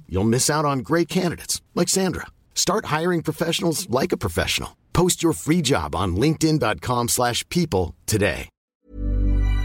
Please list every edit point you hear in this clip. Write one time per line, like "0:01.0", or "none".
0:08.6